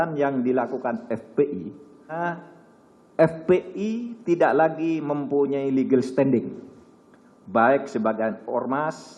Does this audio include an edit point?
yes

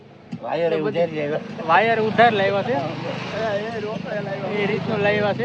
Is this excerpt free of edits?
yes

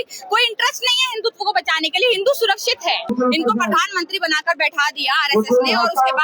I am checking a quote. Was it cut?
yes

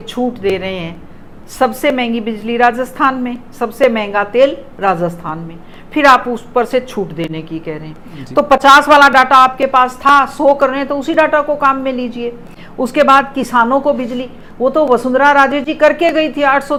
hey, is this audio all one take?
yes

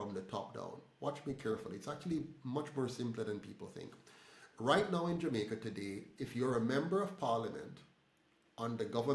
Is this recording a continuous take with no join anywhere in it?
yes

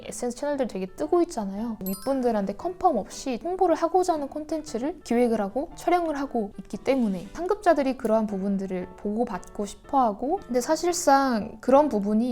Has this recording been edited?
yes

